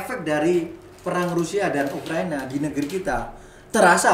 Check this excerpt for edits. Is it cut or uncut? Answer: uncut